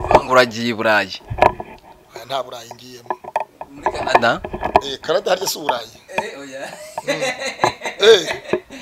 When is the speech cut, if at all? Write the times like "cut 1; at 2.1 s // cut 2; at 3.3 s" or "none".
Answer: none